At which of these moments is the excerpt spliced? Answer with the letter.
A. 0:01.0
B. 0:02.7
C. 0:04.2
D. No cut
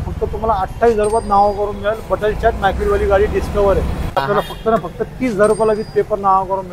C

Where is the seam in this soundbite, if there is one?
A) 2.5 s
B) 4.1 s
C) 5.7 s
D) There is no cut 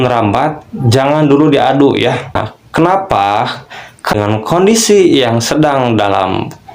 B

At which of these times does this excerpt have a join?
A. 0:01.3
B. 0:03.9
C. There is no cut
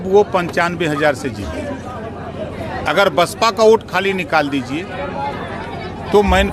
C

